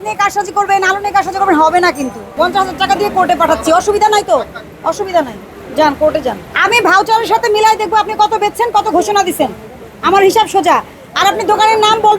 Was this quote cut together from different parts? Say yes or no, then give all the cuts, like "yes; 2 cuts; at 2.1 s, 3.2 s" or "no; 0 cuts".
yes; 2 cuts; at 2.3 s, 6.5 s